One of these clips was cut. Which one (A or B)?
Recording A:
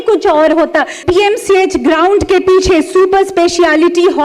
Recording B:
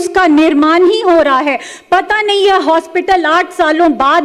A